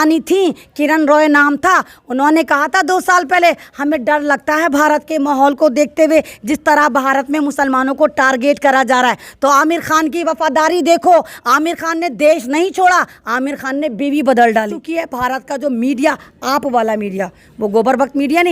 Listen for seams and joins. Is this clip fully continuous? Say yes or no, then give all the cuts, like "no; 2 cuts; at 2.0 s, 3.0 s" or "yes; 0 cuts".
no; 1 cut; at 14.8 s